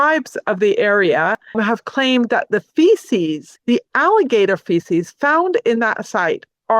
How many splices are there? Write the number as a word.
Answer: two